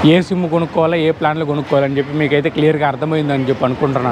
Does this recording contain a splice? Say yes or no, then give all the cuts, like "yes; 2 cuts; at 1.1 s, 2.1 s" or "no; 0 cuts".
no; 0 cuts